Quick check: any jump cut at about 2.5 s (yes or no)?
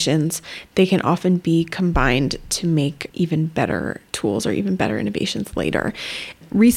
no